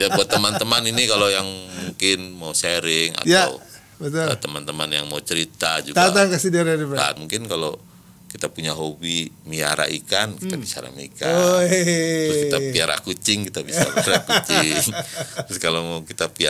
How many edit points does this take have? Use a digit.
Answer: 1